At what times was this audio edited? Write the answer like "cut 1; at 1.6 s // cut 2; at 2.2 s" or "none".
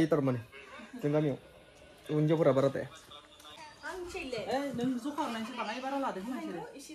none